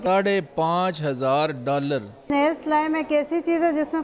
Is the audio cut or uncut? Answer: cut